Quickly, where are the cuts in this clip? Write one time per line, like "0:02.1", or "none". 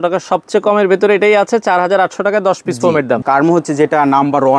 0:03.2